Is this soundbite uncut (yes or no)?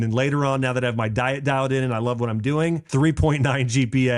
no